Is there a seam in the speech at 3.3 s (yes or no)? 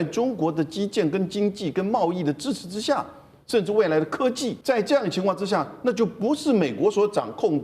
no